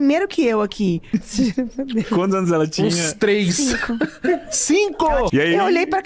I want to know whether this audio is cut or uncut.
cut